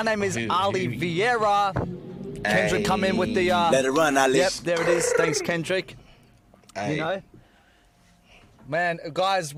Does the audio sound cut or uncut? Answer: uncut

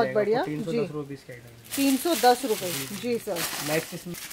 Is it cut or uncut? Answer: uncut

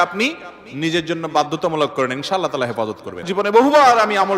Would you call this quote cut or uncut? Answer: cut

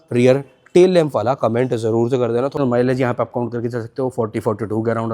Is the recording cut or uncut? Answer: cut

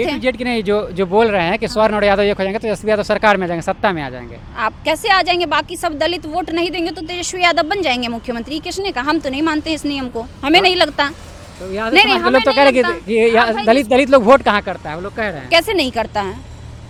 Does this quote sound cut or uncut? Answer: uncut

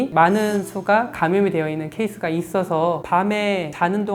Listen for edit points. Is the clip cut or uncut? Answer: cut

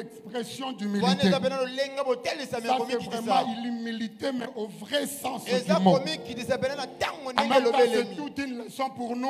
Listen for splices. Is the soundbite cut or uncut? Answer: uncut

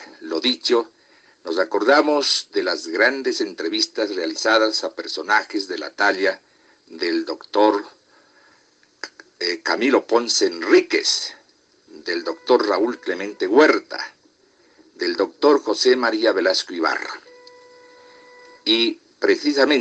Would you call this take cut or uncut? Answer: uncut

